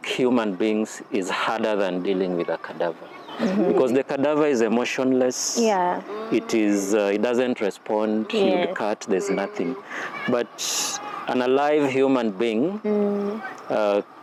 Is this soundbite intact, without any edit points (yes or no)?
yes